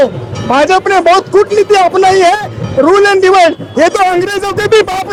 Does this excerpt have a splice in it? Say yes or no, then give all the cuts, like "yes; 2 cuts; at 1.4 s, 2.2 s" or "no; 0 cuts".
no; 0 cuts